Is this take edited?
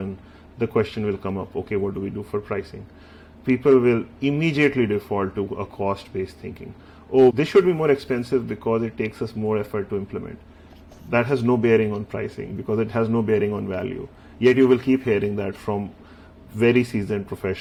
no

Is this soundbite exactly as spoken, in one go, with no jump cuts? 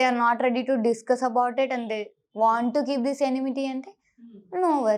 yes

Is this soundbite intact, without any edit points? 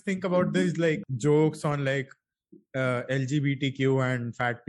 no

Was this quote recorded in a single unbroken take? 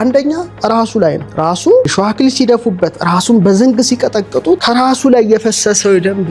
no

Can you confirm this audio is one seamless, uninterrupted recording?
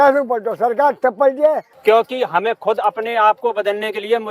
no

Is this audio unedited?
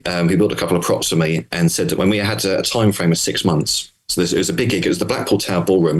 yes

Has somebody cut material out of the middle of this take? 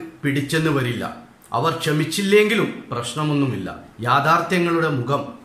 no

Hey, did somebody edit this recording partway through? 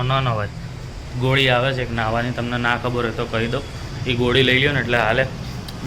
no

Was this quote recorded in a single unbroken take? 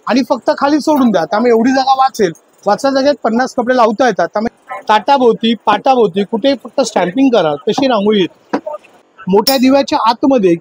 no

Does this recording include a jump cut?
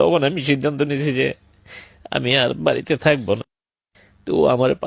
yes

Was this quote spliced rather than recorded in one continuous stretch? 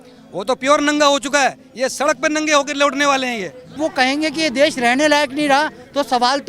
yes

